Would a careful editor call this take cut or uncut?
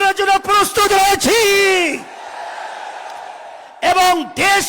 uncut